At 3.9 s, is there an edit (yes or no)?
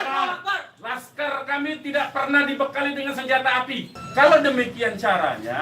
yes